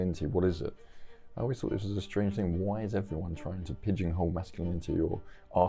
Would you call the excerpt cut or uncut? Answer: uncut